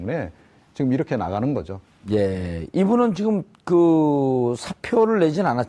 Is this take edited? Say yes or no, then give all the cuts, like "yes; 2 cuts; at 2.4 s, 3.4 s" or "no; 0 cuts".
yes; 1 cut; at 2.4 s